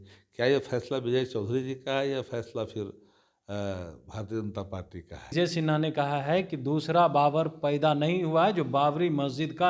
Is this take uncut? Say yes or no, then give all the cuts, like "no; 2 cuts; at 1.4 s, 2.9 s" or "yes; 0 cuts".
no; 1 cut; at 5.3 s